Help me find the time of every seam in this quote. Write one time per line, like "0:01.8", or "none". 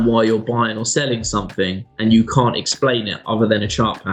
none